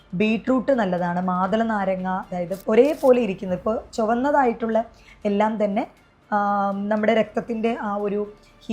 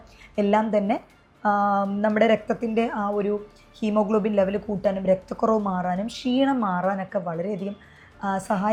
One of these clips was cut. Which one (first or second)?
first